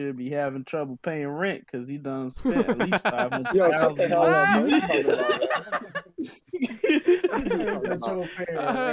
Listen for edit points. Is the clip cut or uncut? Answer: uncut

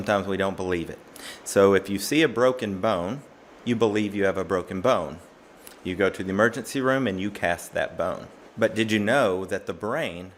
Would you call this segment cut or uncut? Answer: uncut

